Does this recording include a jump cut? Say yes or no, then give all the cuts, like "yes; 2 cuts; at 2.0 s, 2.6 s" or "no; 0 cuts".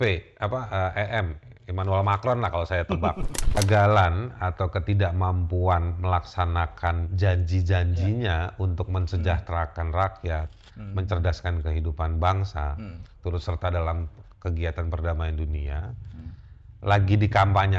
yes; 1 cut; at 3.6 s